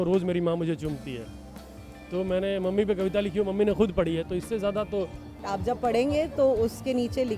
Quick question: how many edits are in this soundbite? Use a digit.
1